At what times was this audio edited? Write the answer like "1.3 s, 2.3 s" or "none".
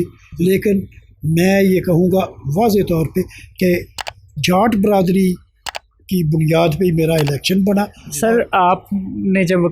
8.0 s